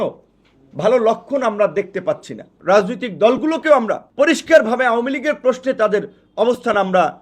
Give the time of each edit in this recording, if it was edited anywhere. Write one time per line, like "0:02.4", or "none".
0:02.5
0:04.0